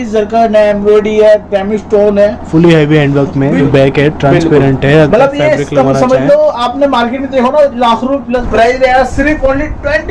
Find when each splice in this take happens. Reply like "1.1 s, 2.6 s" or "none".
3.6 s, 8.4 s